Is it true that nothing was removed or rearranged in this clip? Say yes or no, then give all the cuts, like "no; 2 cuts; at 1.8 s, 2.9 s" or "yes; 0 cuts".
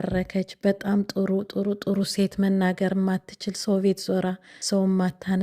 no; 1 cut; at 4.5 s